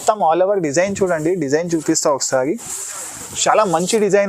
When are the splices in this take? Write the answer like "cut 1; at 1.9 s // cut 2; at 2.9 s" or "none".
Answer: none